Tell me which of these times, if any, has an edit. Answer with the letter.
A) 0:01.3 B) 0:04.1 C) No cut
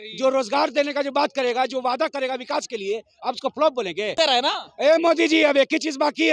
B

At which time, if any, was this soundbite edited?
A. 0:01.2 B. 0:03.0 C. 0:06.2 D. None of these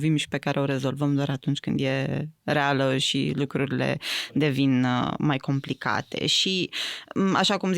D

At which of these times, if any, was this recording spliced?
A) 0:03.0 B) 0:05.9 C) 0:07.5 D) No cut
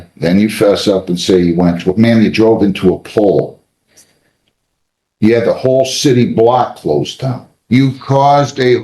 C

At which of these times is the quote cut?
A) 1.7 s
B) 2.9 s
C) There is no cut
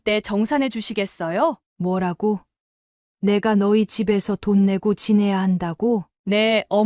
A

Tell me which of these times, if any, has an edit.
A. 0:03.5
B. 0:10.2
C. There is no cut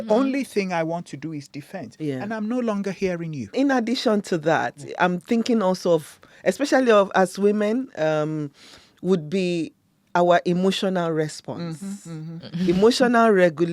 A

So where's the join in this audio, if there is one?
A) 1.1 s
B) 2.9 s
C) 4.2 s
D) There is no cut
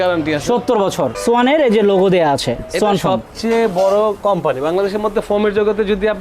A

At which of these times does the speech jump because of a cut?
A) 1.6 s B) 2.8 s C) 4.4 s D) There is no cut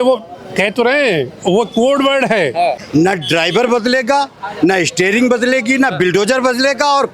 B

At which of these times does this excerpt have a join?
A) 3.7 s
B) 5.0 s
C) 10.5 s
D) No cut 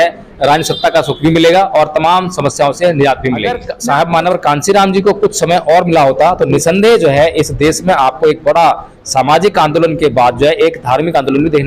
A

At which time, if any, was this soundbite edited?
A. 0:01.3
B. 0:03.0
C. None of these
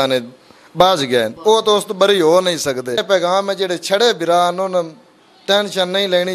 B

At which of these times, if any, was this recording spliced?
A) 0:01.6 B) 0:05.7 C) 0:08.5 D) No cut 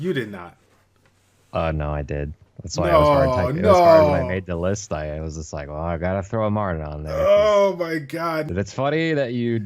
C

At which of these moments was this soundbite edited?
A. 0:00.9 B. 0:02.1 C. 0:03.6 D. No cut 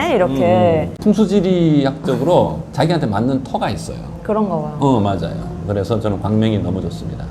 A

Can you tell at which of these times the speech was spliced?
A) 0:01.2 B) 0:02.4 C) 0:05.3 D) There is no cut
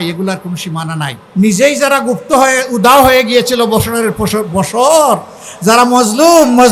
A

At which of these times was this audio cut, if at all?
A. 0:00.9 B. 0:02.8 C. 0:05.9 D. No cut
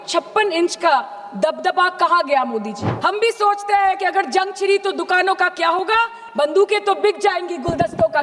B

